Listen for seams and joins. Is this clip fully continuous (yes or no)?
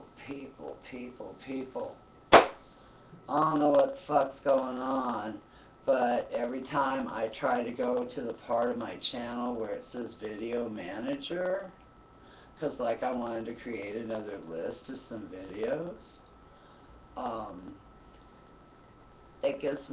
no